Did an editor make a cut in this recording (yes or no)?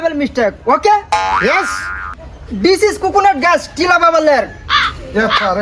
no